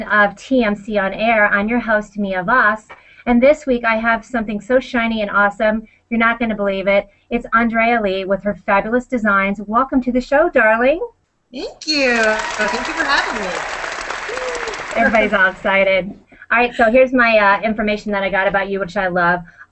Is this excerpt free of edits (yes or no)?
yes